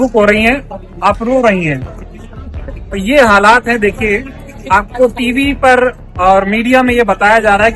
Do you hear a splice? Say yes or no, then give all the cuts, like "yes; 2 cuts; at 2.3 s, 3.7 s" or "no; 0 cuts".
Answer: no; 0 cuts